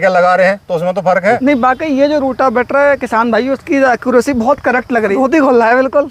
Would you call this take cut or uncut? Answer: cut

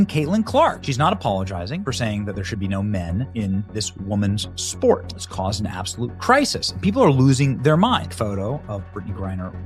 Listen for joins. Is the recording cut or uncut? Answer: uncut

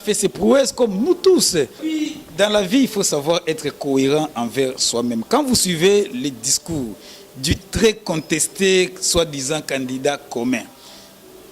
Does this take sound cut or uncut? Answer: cut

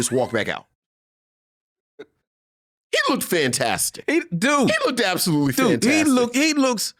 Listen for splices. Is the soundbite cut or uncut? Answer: uncut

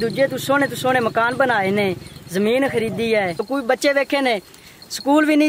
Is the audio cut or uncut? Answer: cut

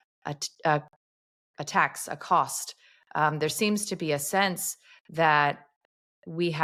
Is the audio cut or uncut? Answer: uncut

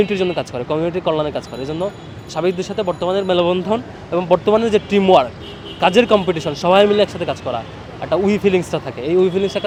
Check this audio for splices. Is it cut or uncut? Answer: uncut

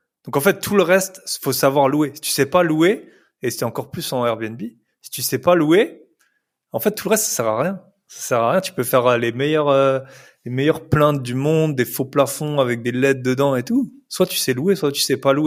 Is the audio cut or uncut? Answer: uncut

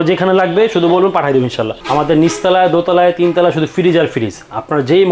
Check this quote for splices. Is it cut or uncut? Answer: cut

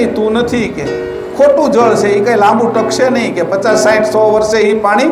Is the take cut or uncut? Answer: uncut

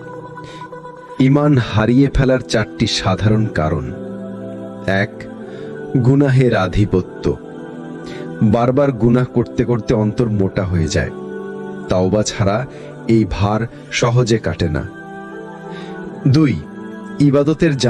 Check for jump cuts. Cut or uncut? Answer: cut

